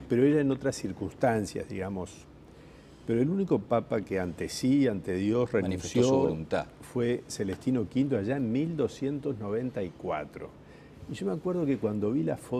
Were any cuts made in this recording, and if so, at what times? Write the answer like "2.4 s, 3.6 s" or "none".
9.2 s